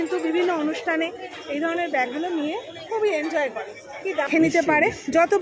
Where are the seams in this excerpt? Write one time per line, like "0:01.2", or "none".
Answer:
0:04.3